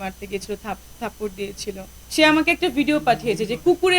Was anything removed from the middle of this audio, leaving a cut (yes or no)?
yes